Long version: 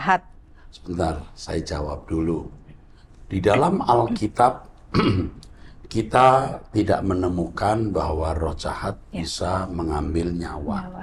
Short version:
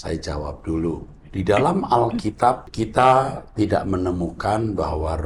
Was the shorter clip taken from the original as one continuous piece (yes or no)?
no